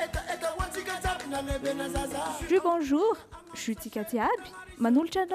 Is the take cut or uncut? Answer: uncut